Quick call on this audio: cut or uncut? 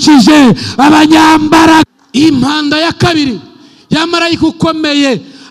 cut